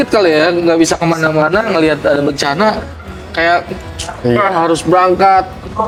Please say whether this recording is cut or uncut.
uncut